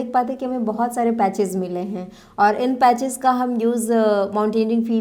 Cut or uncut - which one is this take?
uncut